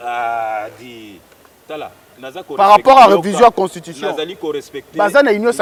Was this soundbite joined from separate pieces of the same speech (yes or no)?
no